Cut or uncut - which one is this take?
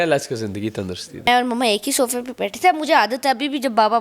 cut